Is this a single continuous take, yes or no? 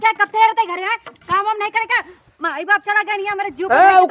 yes